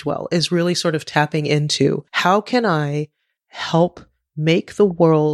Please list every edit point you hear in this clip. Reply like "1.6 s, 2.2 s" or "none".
2.1 s